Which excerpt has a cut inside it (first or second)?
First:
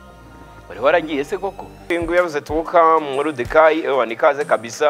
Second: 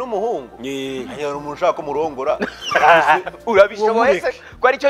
first